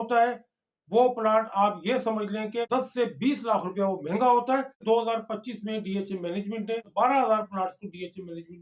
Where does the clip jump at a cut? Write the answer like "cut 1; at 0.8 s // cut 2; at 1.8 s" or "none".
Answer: cut 1; at 2.7 s // cut 2; at 4.8 s // cut 3; at 6.9 s